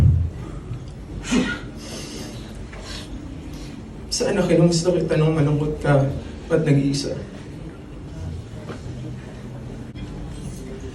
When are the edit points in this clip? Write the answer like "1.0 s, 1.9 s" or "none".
9.9 s